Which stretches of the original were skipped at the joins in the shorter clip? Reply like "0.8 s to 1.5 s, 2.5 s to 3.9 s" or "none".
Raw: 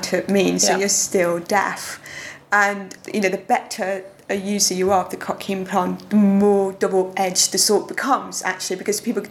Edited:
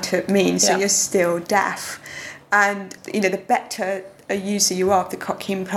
none